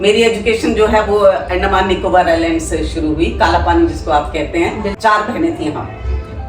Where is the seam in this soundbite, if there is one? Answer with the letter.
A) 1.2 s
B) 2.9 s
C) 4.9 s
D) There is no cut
C